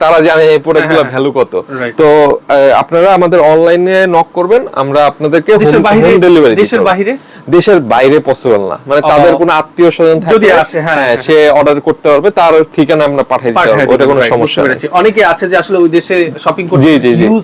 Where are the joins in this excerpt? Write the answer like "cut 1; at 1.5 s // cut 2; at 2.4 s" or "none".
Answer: none